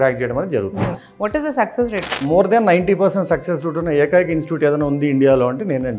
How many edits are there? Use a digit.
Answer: 2